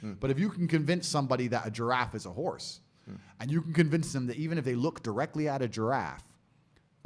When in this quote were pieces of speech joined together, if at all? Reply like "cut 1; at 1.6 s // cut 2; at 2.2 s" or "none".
none